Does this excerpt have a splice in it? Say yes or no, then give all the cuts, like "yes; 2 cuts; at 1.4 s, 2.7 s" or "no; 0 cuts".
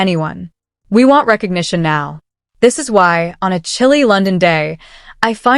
yes; 1 cut; at 1.3 s